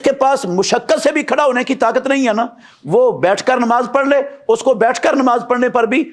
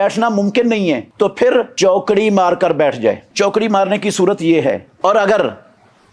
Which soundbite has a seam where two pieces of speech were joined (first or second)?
second